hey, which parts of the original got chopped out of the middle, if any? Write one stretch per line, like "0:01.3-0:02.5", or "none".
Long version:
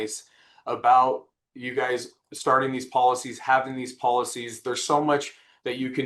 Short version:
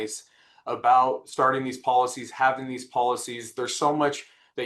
0:01.3-0:02.3